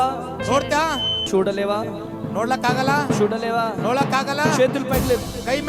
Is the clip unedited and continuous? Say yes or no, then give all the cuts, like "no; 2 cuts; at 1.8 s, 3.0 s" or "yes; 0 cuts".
no; 1 cut; at 1.2 s